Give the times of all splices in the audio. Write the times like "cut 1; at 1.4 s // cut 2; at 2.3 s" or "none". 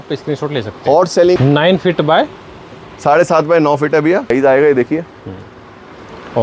cut 1; at 1.4 s // cut 2; at 4.3 s